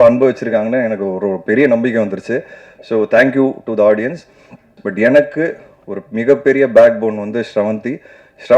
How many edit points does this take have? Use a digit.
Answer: 1